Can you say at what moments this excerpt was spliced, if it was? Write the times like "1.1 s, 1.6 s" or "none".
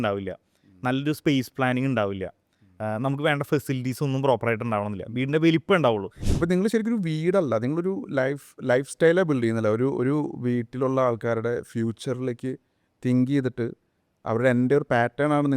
6.2 s